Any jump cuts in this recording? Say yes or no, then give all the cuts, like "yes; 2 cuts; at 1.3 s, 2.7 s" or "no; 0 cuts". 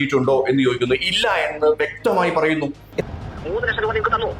yes; 1 cut; at 2.8 s